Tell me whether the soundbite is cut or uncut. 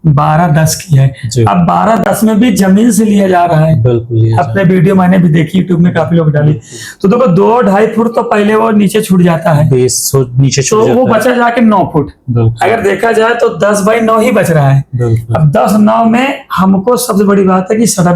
uncut